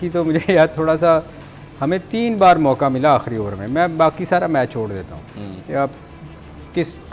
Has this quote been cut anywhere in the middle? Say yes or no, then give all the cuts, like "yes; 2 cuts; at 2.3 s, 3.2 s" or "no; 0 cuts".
no; 0 cuts